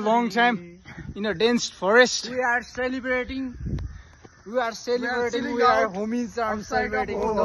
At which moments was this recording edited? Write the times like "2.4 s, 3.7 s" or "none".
none